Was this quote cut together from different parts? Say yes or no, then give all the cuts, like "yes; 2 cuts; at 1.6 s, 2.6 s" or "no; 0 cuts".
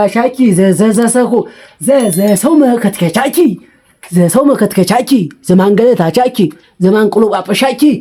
no; 0 cuts